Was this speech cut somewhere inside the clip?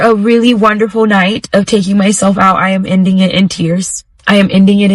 no; 0 cuts

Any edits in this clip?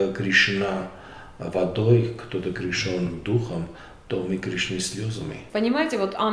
yes; 1 cut; at 5.4 s

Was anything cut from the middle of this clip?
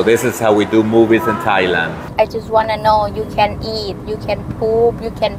yes; 1 cut; at 2.0 s

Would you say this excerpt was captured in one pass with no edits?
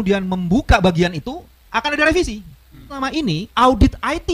no; 1 cut; at 2.9 s

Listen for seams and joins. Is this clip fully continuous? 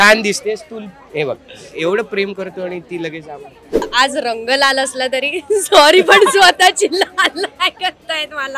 no; 1 cut; at 3.9 s

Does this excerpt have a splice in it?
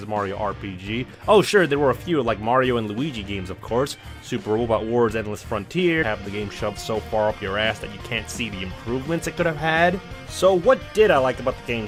no; 0 cuts

